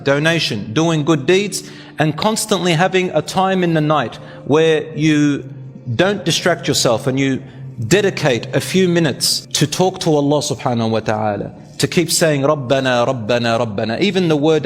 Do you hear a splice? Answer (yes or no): no